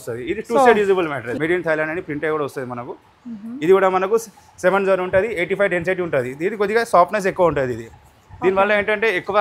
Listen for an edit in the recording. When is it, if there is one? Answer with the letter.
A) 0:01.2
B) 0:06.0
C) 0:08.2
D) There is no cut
A